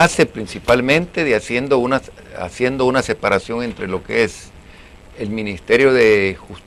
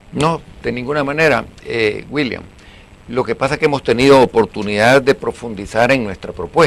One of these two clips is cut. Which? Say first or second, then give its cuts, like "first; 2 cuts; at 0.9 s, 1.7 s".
second; 1 cut; at 4.5 s